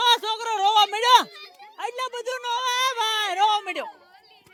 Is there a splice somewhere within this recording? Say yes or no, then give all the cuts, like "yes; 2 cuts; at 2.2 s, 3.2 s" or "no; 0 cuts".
no; 0 cuts